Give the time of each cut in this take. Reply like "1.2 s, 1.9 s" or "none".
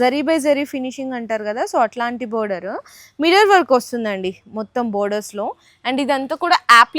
none